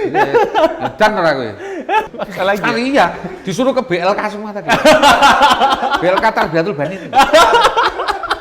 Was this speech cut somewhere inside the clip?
yes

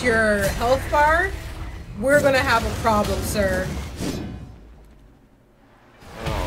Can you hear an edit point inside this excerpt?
no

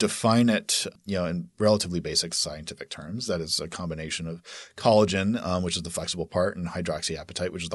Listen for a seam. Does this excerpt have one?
yes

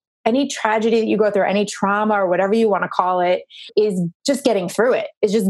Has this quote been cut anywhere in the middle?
yes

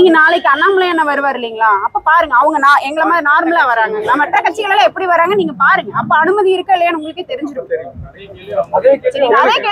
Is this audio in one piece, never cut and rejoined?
yes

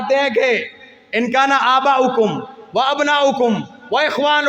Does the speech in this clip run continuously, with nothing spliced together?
yes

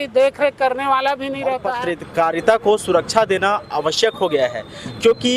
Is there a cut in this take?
yes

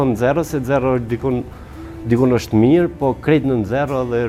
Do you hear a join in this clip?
no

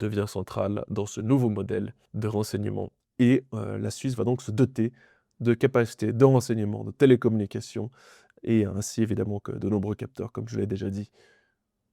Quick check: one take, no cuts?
no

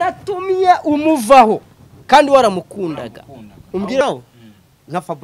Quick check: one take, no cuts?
no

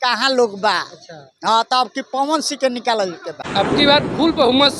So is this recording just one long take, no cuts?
no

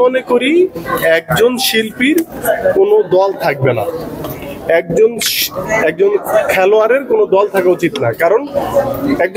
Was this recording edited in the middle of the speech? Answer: no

